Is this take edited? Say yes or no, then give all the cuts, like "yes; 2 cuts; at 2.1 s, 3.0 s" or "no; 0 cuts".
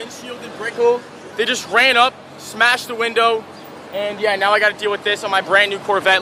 no; 0 cuts